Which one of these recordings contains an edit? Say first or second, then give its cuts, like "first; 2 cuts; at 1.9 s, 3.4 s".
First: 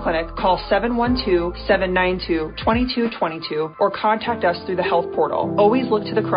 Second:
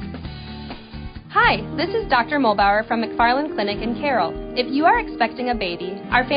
second; 1 cut; at 0.9 s